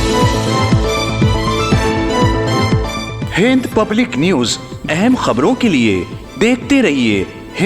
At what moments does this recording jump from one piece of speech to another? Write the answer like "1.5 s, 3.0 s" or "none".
4.9 s